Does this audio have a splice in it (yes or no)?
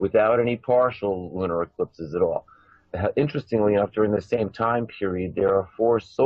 yes